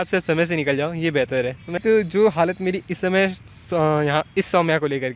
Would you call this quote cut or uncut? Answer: cut